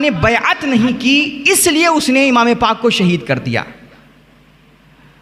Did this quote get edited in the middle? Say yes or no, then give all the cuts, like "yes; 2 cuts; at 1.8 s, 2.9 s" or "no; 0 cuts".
no; 0 cuts